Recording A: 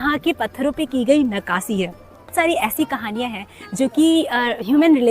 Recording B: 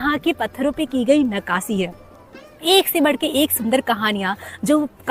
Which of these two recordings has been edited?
A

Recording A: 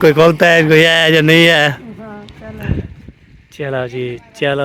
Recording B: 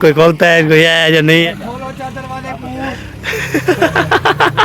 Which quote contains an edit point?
B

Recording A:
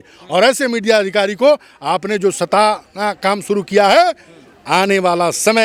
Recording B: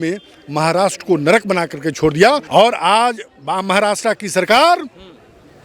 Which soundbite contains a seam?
B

